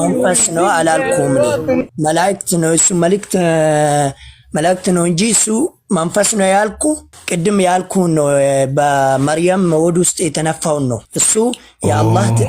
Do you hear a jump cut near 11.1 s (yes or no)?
yes